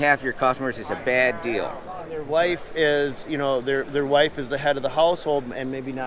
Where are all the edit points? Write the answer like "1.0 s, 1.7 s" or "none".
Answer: 2.2 s

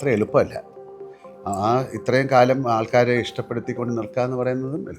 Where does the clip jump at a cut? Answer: none

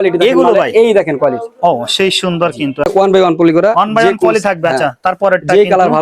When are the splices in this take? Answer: 2.9 s

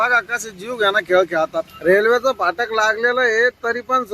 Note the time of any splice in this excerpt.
1.7 s

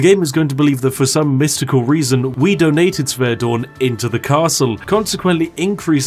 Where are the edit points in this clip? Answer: 4.8 s

